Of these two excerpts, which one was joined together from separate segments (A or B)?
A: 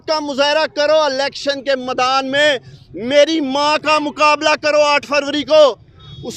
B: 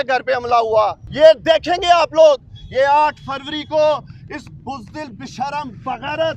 B